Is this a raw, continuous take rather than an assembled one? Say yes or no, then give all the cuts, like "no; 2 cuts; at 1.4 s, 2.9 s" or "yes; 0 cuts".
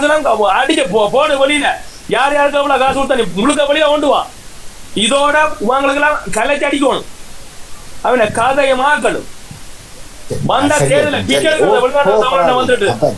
yes; 0 cuts